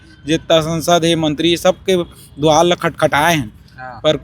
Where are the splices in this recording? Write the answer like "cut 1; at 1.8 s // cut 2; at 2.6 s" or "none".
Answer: none